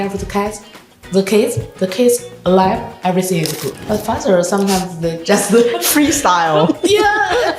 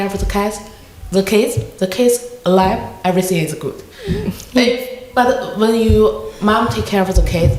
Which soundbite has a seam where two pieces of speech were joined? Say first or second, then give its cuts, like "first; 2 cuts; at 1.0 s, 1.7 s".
first; 1 cut; at 3.7 s